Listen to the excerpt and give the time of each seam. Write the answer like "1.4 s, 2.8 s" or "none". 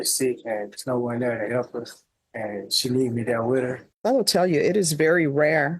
3.9 s